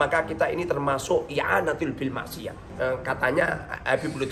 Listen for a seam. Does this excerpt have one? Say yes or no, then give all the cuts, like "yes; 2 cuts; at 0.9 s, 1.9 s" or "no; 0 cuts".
yes; 1 cut; at 2.6 s